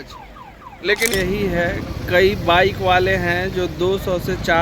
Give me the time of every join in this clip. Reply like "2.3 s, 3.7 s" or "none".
1.1 s